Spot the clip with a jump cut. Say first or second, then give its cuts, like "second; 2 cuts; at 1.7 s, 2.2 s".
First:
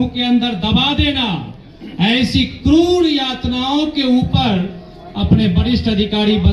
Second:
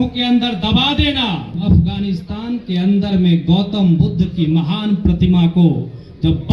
second; 1 cut; at 1.6 s